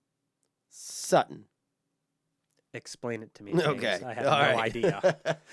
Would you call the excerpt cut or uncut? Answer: uncut